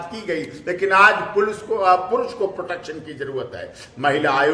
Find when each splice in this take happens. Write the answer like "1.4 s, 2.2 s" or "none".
none